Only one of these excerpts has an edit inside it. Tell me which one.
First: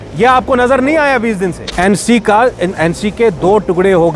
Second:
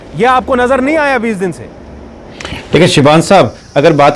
first; 1 cut; at 1.6 s

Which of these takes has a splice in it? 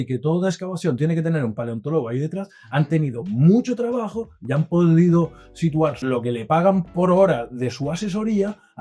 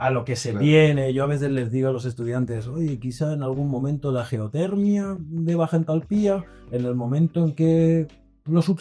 first; 1 cut; at 6.0 s

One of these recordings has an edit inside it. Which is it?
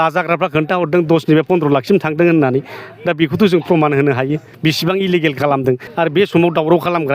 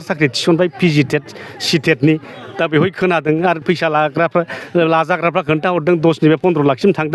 first; 2 cuts; at 4.5 s, 5.9 s

